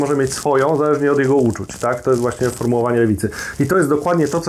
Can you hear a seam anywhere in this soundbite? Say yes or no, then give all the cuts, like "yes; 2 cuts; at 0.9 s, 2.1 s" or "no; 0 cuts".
no; 0 cuts